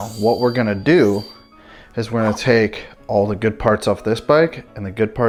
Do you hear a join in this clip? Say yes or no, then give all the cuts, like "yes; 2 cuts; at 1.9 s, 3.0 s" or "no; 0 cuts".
no; 0 cuts